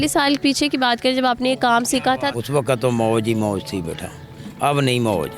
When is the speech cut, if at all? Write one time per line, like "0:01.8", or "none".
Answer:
0:02.3